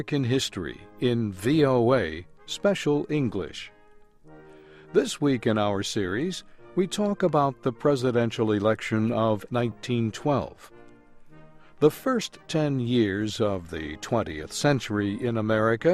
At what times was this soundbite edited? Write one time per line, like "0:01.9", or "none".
none